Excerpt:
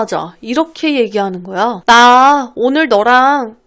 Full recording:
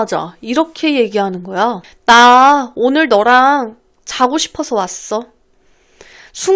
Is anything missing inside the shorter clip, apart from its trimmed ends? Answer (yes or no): yes